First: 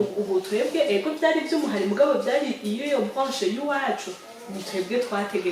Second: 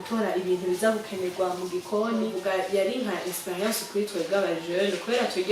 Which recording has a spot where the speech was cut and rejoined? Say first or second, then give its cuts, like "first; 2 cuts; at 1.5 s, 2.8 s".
second; 1 cut; at 2.4 s